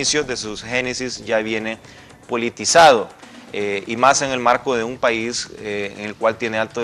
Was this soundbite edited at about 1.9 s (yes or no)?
no